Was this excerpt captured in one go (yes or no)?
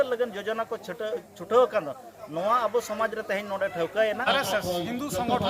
no